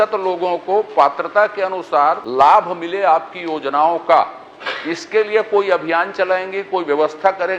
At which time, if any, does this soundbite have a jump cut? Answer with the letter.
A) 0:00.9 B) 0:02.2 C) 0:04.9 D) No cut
B